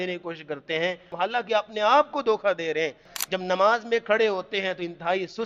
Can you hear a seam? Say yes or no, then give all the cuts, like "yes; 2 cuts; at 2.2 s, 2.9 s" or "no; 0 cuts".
yes; 2 cuts; at 1.1 s, 3.2 s